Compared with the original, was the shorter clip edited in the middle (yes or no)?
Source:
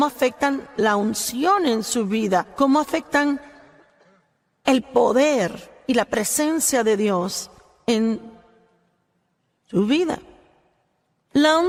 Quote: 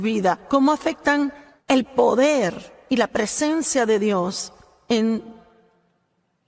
yes